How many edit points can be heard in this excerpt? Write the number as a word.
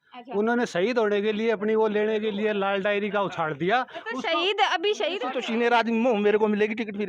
one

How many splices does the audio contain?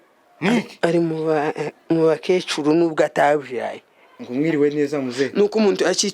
one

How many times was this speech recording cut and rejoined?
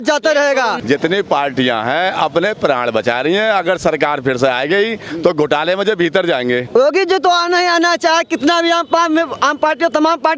two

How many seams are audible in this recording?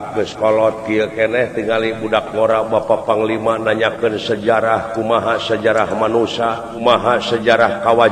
one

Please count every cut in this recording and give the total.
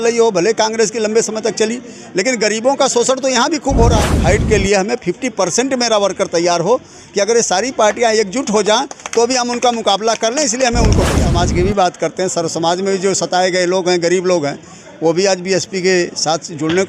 two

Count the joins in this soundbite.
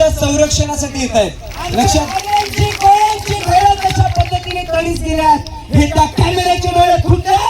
one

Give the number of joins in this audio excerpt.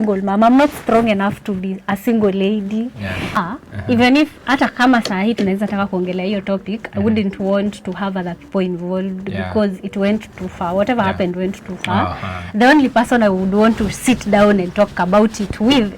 one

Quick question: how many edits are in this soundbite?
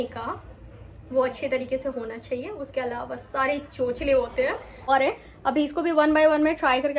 one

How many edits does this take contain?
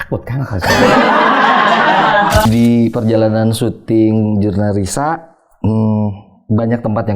one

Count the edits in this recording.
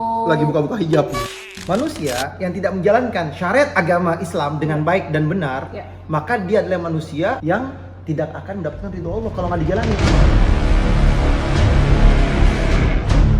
one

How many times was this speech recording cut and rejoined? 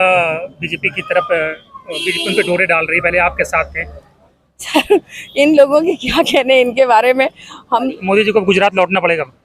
one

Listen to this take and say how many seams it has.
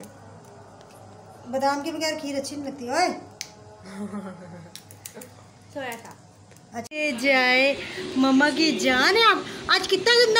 one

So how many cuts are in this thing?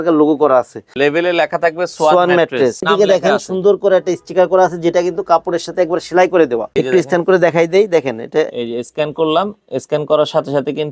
three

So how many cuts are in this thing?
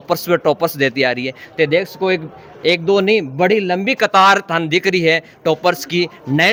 zero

